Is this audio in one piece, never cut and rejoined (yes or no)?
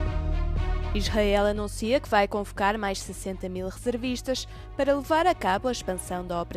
no